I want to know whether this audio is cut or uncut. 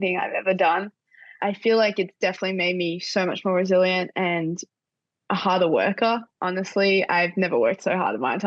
cut